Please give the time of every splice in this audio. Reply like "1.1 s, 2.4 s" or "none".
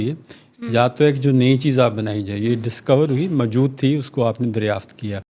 none